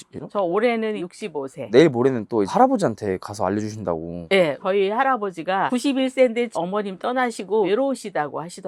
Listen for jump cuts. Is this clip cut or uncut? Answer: uncut